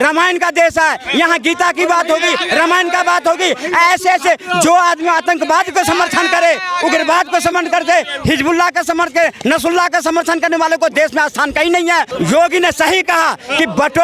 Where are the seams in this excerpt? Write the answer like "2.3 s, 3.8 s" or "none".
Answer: 12.1 s

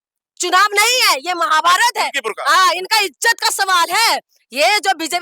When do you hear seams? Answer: none

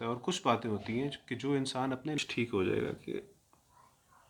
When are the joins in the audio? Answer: 2.2 s

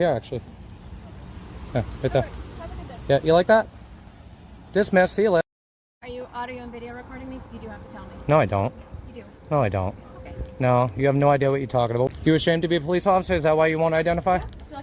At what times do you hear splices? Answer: 6.0 s, 8.2 s, 12.1 s

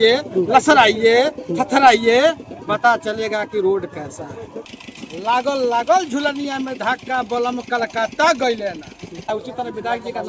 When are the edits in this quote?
4.8 s, 9.3 s

